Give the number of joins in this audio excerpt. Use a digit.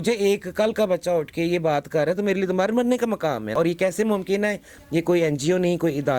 1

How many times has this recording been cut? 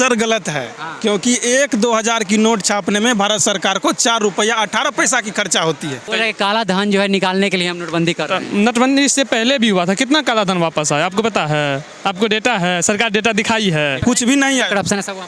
2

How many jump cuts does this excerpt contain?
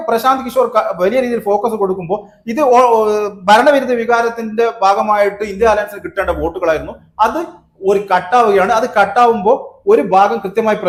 0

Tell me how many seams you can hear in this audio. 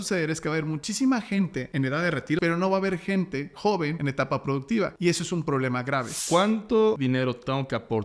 5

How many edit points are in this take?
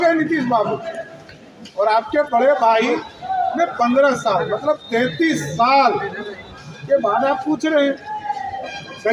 0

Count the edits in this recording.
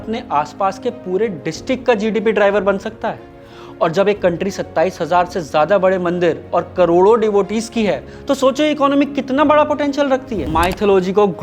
1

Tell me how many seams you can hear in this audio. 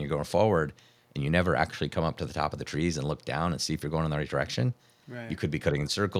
0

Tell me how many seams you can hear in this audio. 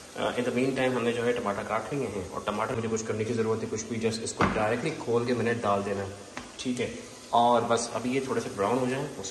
1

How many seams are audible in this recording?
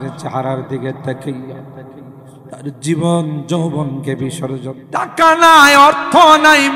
1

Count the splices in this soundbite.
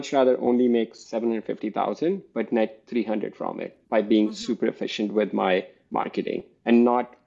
0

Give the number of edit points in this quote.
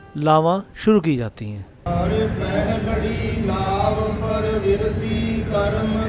1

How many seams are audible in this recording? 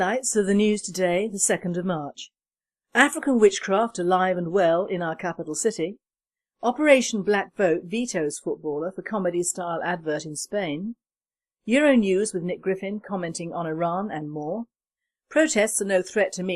1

